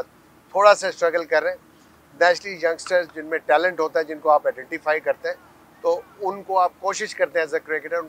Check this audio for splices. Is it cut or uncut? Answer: uncut